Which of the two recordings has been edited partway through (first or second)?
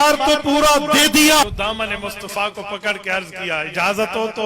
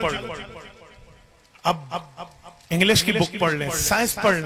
first